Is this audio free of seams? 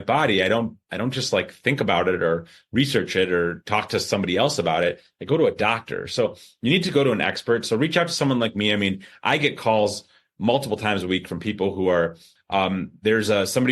no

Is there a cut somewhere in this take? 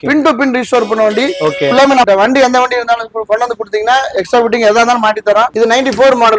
yes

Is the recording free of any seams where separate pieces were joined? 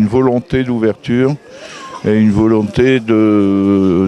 yes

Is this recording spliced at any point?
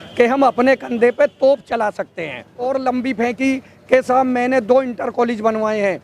yes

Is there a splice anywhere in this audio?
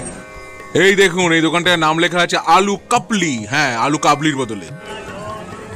yes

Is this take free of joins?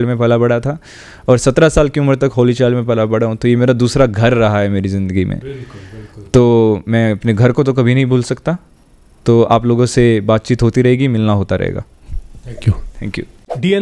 yes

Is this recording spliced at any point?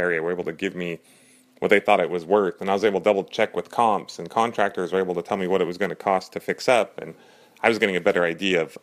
no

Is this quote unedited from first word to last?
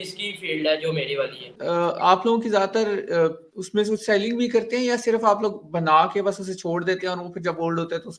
no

